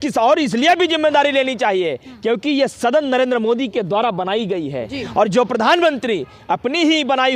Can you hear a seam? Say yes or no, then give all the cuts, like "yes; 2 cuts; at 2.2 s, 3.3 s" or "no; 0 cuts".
no; 0 cuts